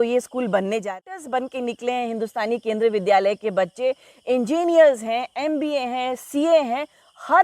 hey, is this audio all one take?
no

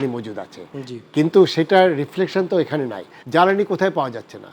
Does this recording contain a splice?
yes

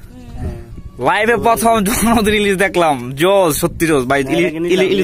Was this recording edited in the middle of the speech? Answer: no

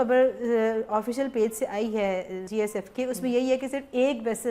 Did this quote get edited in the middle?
yes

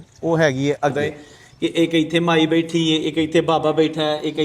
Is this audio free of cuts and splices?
no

